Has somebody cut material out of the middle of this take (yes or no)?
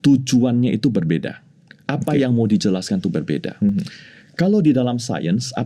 no